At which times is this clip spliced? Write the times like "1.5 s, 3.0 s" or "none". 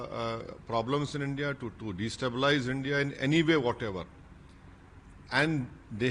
none